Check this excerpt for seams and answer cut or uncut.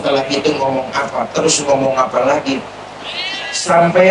uncut